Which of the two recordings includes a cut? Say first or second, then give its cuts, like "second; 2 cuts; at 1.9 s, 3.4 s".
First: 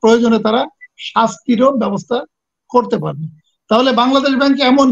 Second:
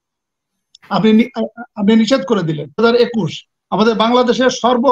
second; 1 cut; at 2.8 s